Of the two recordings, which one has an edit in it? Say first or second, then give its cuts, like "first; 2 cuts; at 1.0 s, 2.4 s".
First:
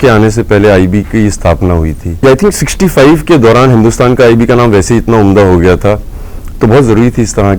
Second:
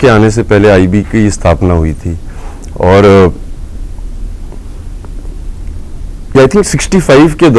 first; 1 cut; at 2.0 s